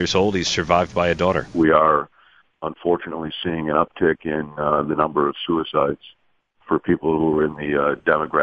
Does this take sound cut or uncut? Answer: cut